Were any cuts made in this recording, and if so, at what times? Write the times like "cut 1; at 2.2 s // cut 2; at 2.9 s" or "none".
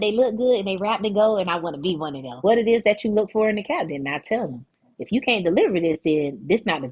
cut 1; at 2.4 s